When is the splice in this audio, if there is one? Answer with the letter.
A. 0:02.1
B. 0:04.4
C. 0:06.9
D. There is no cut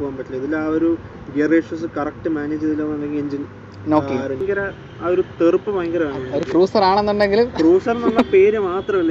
B